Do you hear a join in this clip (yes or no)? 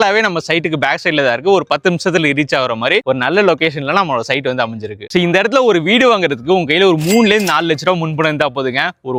no